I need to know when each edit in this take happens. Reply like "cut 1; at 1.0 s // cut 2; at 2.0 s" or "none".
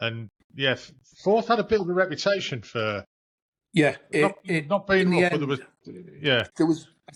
none